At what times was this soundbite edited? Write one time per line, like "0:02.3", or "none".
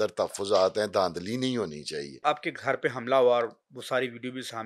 0:02.2

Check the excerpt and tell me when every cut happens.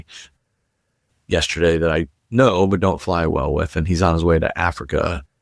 none

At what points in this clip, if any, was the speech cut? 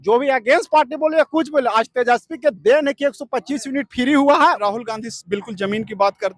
0:04.6

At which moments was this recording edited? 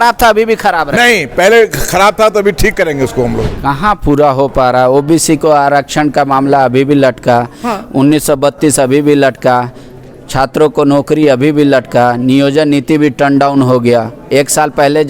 0:03.5

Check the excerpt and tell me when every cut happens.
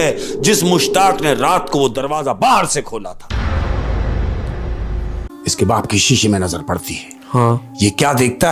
0:05.3

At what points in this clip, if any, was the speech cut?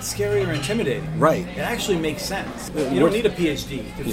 0:02.7

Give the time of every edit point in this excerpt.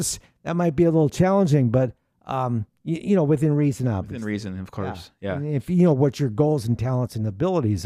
none

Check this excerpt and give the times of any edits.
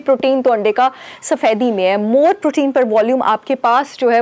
none

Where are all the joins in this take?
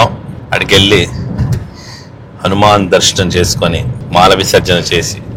0:03.9

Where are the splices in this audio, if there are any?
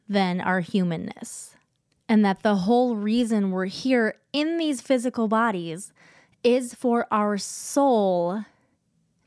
none

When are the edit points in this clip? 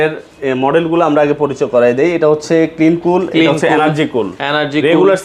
none

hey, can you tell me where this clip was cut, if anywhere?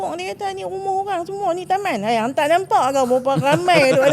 none

